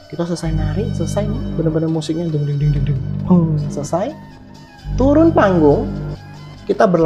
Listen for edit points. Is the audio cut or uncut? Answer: uncut